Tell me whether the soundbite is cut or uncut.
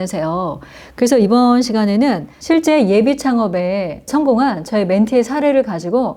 cut